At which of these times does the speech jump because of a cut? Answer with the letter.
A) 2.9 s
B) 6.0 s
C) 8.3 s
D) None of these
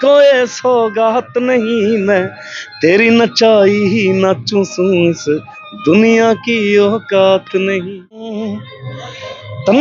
C